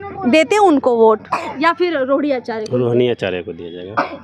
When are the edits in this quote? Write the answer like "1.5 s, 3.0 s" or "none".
none